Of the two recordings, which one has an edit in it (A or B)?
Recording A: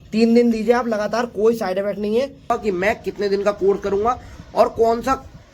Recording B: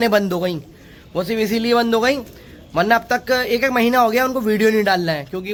A